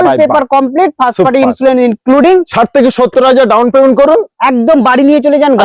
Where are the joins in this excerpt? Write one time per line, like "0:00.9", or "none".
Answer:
none